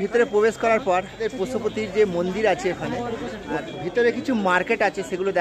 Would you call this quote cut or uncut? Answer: cut